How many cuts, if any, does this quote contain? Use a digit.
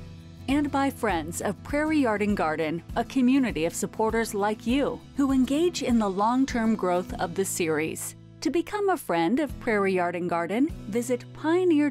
0